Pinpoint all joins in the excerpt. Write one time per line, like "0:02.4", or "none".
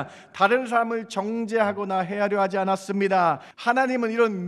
0:03.5